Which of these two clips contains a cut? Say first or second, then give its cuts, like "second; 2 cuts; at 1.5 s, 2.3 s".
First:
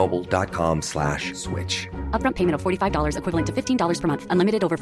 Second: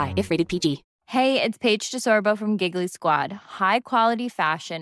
second; 1 cut; at 0.9 s